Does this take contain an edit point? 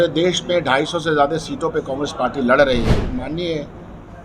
yes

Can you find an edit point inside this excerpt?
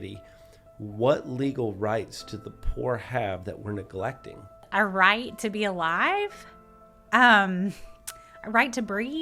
yes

